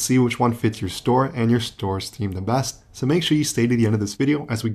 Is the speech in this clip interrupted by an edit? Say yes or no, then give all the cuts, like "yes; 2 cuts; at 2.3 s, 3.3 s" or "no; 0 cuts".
no; 0 cuts